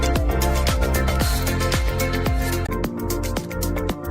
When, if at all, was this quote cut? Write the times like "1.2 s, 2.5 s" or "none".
2.7 s